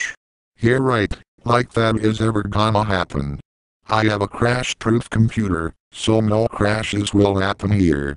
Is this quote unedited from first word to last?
yes; 0 cuts

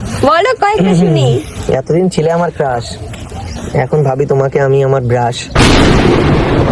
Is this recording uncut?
yes; 0 cuts

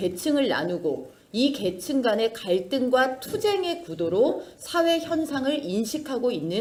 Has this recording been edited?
no; 0 cuts

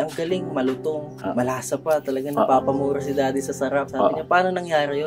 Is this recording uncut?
yes; 0 cuts

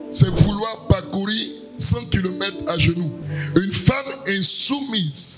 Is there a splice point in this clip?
yes; 1 cut; at 3.2 s

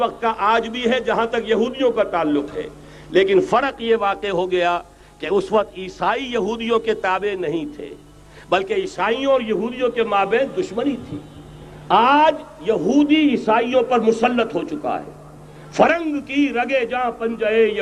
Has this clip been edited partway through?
no; 0 cuts

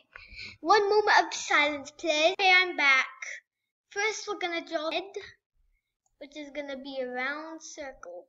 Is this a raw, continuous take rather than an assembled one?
yes; 0 cuts

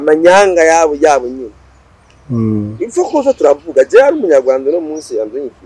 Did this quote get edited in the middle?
no; 0 cuts

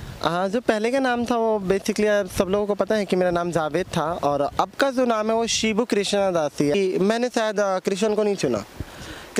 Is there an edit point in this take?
yes; 1 cut; at 6.8 s

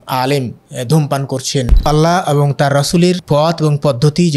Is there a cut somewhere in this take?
yes; 2 cuts; at 1.9 s, 3.2 s

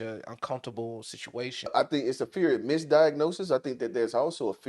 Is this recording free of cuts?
no; 1 cut; at 1.7 s

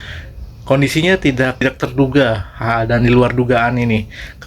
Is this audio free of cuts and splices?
no; 1 cut; at 1.6 s

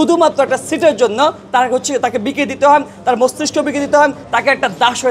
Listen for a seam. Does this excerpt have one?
yes; 1 cut; at 4.2 s

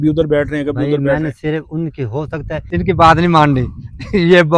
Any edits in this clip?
yes; 1 cut; at 2.6 s

